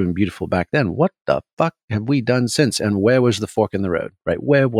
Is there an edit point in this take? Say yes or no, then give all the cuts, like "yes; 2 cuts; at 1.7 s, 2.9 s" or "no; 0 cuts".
no; 0 cuts